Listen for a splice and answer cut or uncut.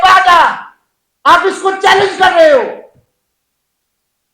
uncut